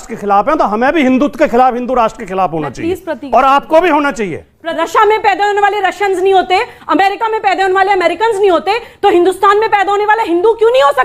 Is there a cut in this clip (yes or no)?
yes